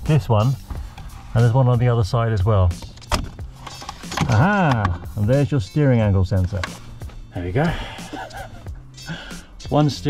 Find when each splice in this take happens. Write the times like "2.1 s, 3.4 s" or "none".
2.9 s, 6.8 s